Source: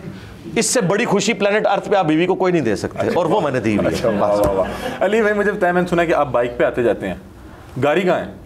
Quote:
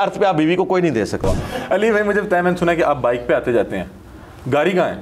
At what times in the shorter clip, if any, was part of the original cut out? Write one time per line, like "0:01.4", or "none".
0:01.2